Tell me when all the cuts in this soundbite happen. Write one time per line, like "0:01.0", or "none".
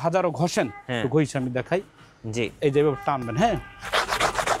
none